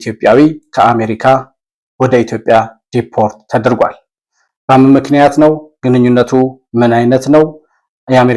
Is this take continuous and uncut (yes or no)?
yes